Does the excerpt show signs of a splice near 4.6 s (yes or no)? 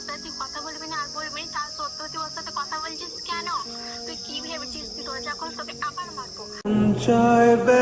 no